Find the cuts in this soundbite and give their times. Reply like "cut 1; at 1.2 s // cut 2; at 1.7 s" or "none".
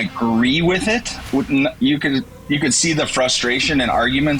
none